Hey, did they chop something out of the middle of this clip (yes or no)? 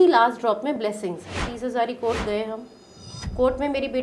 yes